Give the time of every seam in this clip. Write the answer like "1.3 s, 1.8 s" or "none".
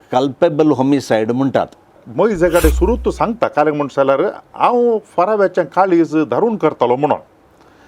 2.0 s